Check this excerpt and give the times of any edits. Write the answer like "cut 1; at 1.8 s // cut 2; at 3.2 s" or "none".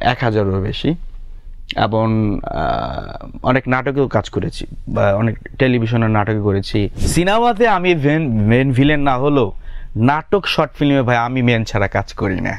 cut 1; at 7.0 s